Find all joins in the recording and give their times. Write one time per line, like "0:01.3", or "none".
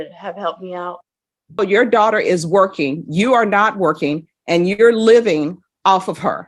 0:01.6